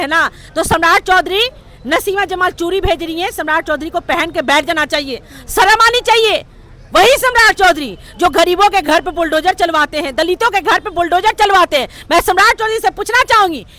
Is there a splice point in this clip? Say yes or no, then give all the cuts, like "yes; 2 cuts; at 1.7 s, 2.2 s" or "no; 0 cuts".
no; 0 cuts